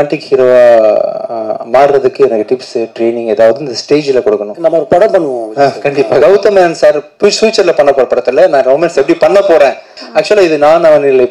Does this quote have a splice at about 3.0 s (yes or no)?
no